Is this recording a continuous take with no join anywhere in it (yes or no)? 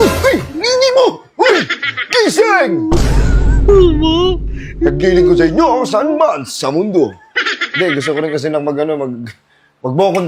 yes